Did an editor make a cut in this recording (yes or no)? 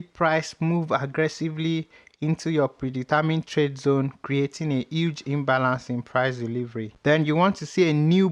no